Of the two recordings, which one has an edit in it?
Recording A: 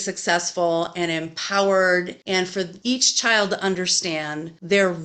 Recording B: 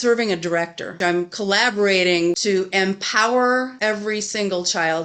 B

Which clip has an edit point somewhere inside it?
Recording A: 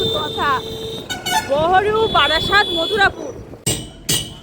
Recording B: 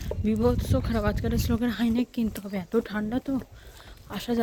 A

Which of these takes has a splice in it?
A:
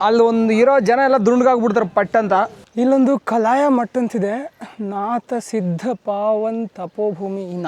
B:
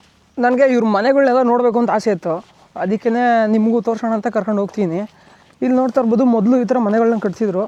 A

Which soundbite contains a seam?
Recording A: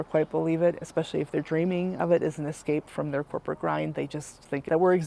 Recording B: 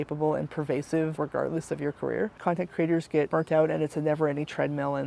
B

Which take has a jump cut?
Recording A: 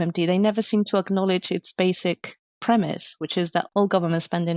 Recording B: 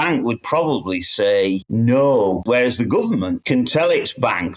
B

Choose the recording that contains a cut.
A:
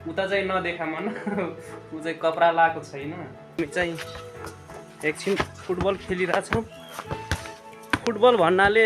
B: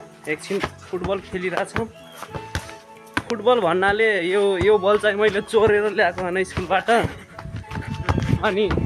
A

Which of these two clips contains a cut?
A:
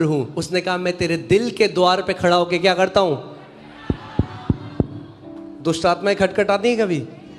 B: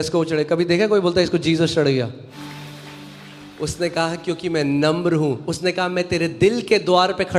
B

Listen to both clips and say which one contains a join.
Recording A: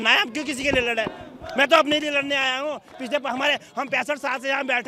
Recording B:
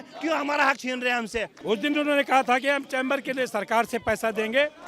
B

